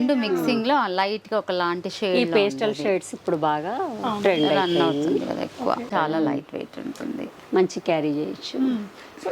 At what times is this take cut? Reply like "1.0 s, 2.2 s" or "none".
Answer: 5.9 s

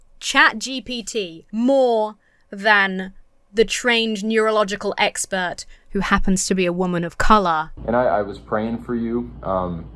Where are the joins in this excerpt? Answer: 1.4 s, 7.7 s

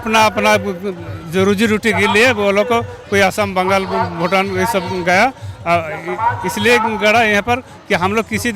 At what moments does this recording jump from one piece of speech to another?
none

